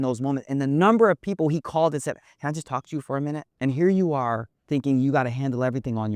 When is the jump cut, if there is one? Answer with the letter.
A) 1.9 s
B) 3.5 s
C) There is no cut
B